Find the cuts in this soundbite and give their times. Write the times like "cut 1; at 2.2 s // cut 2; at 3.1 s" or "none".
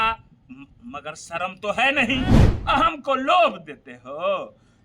cut 1; at 2.5 s